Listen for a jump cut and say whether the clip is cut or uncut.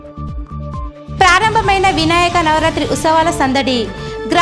cut